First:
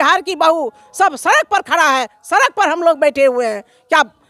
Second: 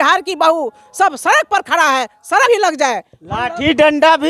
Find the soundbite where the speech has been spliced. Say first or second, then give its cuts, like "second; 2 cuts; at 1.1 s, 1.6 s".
second; 1 cut; at 2.5 s